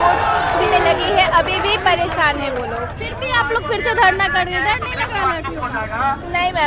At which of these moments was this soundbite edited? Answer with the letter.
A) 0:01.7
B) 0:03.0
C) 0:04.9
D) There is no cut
B